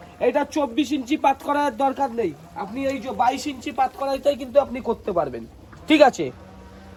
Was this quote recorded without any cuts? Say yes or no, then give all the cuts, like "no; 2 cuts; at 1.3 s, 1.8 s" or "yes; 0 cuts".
yes; 0 cuts